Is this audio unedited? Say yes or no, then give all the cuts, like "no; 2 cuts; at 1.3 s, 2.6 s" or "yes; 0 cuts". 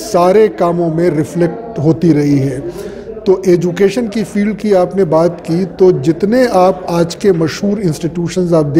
yes; 0 cuts